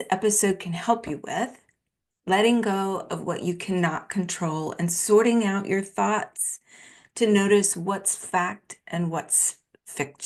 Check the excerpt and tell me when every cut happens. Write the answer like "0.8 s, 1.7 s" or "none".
none